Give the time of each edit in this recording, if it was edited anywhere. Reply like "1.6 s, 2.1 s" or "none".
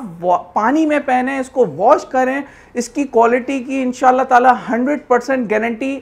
none